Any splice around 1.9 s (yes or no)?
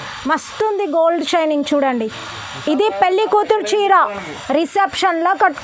no